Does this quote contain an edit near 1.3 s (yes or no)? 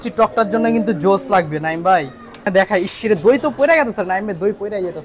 no